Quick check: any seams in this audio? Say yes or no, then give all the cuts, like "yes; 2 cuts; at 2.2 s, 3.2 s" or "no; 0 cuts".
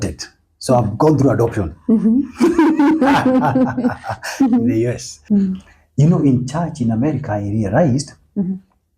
yes; 1 cut; at 5.1 s